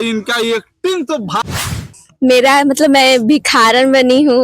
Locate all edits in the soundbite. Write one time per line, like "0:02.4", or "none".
0:01.8